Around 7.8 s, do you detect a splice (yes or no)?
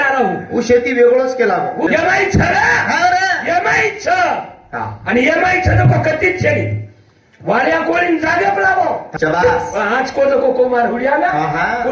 no